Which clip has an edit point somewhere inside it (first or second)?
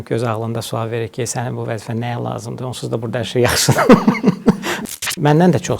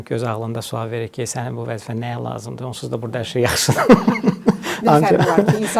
first